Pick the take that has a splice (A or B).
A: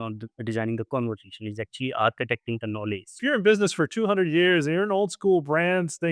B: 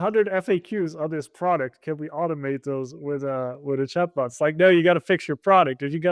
A